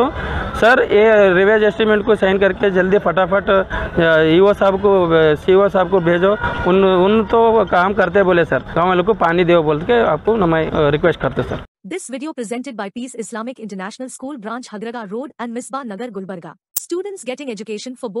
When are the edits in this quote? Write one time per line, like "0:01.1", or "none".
0:08.6
0:10.7
0:11.6